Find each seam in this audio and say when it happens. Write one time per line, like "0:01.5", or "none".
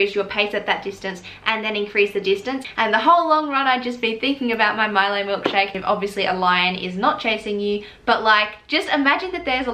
0:02.7
0:05.8